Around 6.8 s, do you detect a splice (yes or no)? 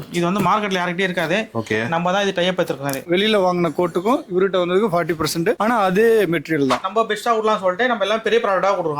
yes